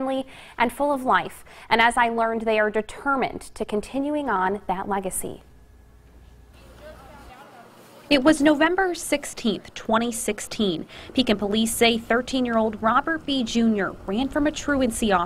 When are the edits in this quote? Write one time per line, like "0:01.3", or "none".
0:08.3